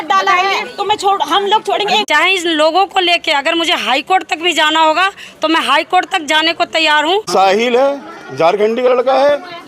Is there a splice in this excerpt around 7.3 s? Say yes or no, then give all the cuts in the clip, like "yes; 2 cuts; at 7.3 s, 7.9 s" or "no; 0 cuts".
yes; 2 cuts; at 2.0 s, 7.3 s